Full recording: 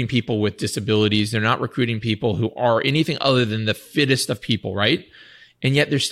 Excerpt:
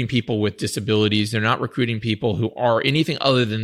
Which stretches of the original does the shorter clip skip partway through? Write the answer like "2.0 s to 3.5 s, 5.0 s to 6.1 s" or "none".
none